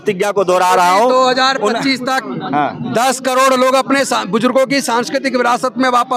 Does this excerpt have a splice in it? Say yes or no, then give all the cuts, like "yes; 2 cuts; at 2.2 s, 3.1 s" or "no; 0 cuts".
no; 0 cuts